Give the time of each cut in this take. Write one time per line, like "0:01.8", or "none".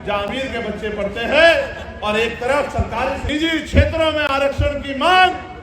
0:03.2